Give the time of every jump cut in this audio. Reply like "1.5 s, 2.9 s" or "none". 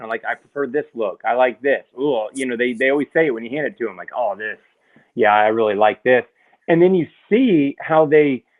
none